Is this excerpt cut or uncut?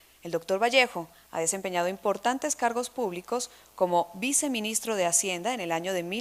cut